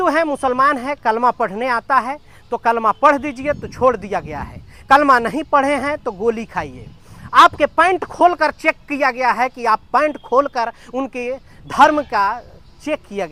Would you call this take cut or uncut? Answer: uncut